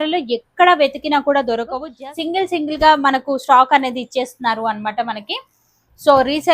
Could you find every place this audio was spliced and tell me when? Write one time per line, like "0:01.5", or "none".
0:01.8